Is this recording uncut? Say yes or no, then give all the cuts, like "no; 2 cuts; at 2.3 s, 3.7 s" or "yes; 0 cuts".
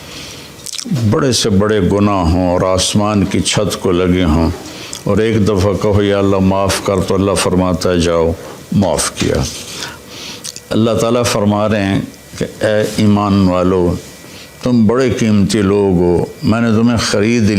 no; 1 cut; at 10.0 s